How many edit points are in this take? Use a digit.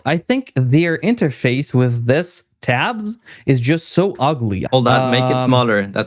1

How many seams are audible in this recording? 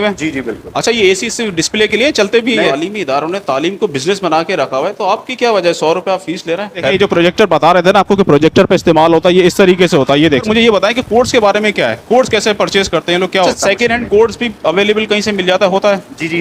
4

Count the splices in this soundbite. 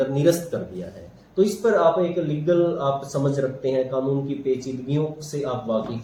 0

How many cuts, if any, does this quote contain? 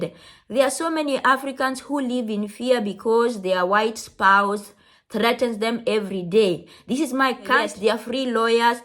1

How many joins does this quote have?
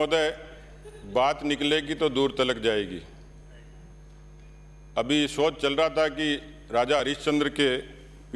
0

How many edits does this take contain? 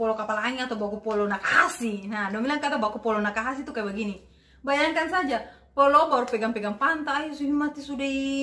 0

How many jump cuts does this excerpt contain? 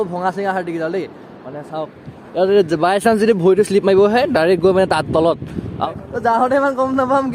1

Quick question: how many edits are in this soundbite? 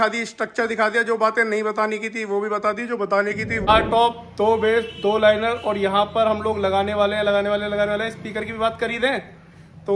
1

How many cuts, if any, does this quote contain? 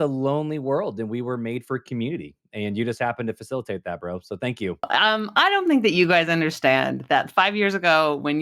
1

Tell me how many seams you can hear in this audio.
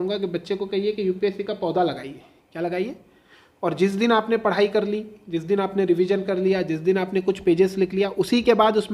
0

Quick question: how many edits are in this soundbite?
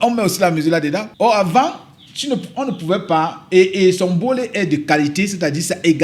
1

